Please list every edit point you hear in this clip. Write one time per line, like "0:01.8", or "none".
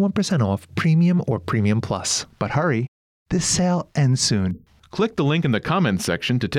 none

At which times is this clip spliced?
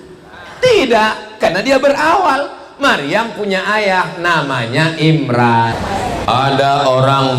0:05.7

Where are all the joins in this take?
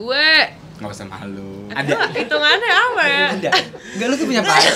0:01.7

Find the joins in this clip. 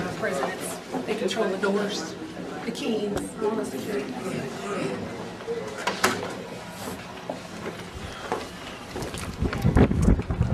0:08.9

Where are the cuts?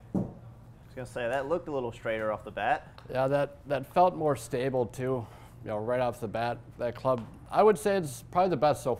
0:03.0
0:07.4

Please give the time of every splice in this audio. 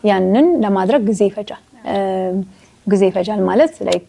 none

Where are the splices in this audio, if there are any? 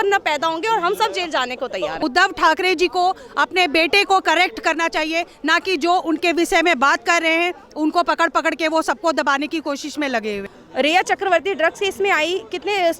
0:02.0
0:10.5

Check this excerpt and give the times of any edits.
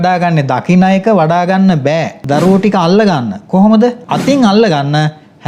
0:02.2
0:04.1

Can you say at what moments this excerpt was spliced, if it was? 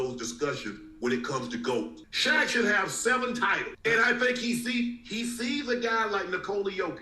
0:02.0

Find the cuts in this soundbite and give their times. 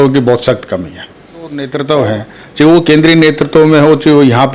0:01.7

